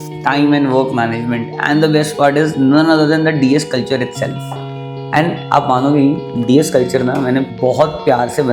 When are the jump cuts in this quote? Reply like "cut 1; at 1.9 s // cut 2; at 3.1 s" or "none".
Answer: cut 1; at 7.5 s